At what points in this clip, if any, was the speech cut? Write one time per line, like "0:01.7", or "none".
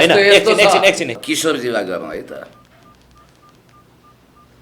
0:01.1